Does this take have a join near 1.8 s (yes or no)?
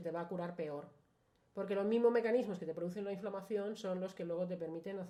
no